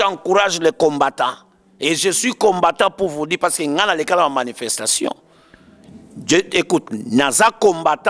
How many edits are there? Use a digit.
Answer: 0